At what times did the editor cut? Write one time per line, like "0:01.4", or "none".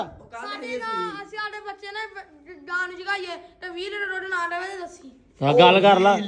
none